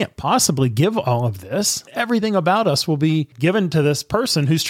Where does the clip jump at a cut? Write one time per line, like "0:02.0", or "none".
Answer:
0:01.8
0:03.3